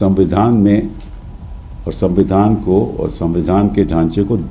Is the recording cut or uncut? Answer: uncut